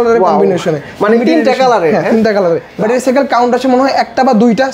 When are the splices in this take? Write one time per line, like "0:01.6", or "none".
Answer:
0:02.7